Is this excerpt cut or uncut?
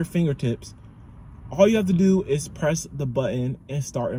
uncut